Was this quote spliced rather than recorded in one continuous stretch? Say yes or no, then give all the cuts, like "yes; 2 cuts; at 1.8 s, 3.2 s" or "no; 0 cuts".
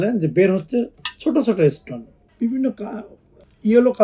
no; 0 cuts